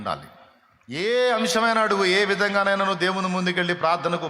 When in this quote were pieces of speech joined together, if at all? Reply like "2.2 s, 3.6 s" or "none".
1.1 s